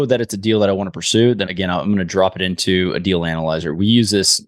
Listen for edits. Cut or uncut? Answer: uncut